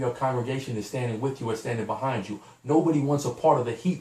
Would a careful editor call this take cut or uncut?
uncut